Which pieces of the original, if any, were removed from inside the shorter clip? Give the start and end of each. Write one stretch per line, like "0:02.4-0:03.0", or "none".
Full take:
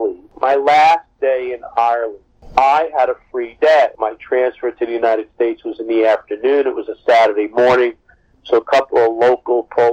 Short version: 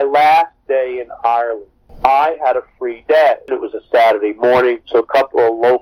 0:04.0-0:06.6
0:08.0-0:08.4